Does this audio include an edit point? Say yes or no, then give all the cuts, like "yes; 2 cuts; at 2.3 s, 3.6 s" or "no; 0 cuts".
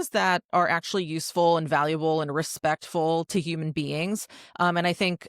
no; 0 cuts